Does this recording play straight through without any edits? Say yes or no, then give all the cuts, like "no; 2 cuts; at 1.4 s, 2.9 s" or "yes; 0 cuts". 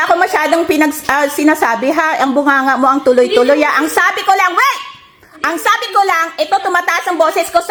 yes; 0 cuts